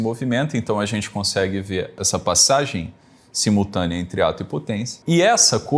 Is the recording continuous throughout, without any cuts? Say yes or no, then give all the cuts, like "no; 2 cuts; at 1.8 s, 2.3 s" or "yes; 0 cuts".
no; 2 cuts; at 2.0 s, 4.9 s